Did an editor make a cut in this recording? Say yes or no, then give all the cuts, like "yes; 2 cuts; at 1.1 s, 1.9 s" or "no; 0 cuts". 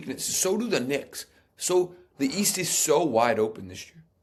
no; 0 cuts